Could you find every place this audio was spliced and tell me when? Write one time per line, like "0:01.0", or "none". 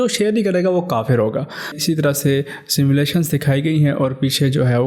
0:01.7